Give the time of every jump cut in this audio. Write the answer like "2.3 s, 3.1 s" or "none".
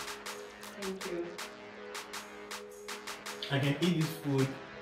1.3 s, 2.9 s